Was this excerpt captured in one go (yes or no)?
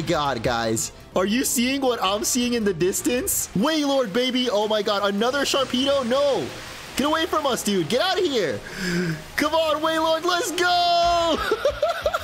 no